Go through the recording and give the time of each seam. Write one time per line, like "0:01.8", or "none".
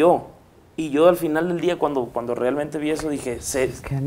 none